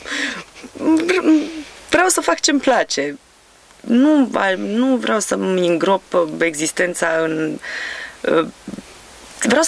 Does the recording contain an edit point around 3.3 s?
no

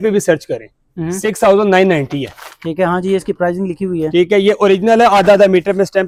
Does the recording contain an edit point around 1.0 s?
no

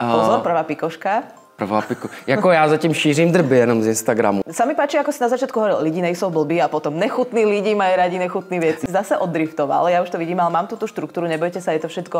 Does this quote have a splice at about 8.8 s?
yes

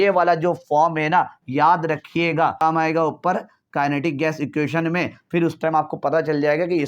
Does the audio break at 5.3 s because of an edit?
no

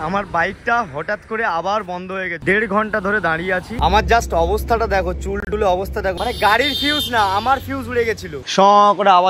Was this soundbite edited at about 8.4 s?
yes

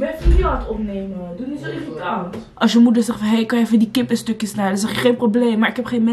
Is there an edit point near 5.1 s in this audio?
no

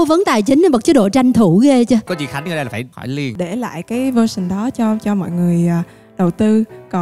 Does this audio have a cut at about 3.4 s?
yes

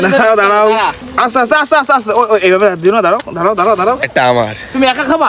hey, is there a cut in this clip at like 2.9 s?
no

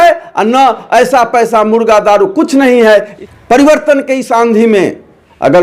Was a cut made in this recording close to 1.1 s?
no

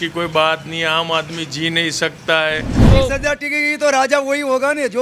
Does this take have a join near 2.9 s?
yes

